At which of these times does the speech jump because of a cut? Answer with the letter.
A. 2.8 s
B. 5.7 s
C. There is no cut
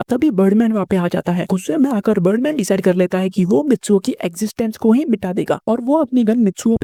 C